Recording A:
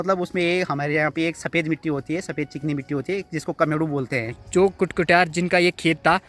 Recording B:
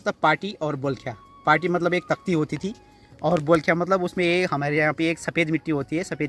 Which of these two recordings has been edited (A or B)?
A